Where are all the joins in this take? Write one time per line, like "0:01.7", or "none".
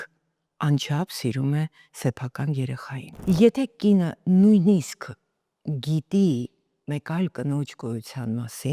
0:03.1